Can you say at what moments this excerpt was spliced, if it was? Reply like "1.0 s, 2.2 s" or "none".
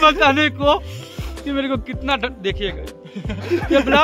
none